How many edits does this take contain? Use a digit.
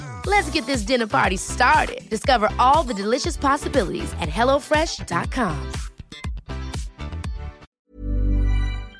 1